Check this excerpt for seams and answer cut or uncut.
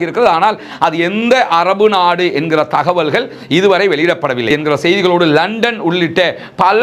cut